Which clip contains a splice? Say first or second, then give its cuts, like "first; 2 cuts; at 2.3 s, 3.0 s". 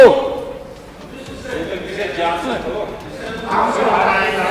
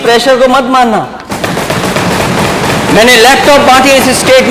second; 1 cut; at 1.2 s